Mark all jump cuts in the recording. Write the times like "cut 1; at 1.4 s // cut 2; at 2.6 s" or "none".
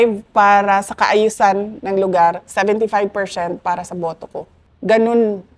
cut 1; at 4.6 s